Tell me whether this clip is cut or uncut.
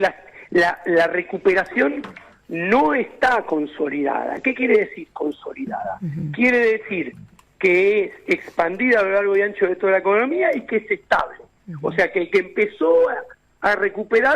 uncut